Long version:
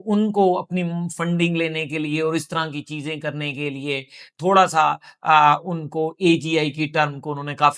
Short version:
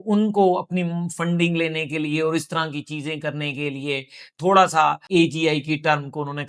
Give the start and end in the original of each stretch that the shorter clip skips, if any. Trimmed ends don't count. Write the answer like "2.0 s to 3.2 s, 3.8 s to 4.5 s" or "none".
5.0 s to 6.1 s